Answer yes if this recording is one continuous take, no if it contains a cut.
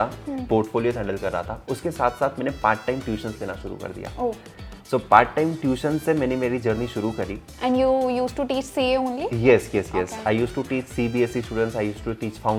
yes